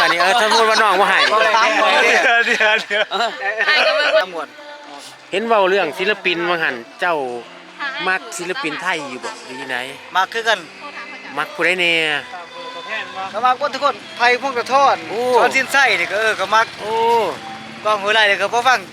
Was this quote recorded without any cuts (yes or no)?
no